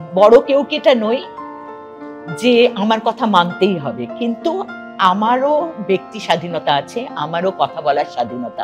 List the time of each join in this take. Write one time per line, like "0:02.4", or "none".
none